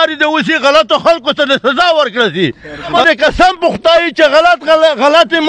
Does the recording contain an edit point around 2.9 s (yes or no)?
yes